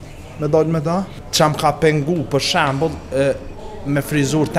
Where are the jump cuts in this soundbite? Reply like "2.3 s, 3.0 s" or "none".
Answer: 1.2 s